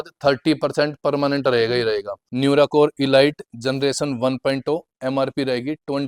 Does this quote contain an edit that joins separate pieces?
yes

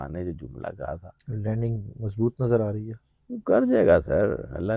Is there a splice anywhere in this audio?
yes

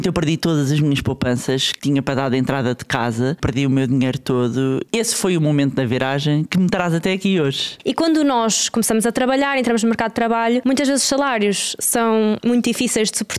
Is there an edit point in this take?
yes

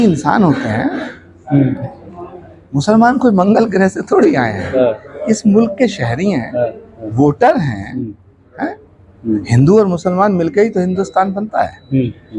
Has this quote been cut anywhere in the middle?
no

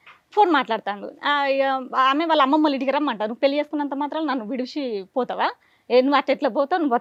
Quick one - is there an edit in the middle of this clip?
no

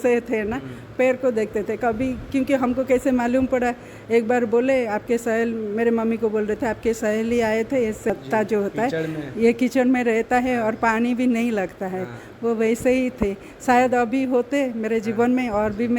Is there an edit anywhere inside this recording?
yes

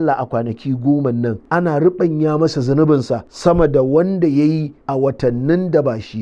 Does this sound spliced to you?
yes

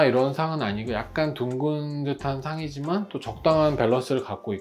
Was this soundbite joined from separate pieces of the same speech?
no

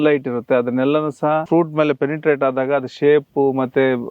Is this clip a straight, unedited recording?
no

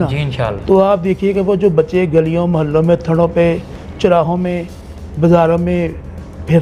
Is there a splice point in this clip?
no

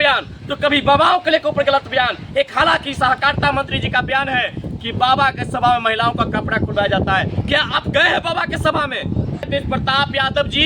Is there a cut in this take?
yes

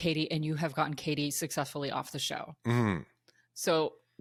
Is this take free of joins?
yes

